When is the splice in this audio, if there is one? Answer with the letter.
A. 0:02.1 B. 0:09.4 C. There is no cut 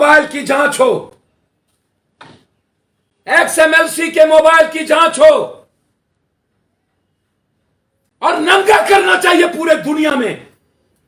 C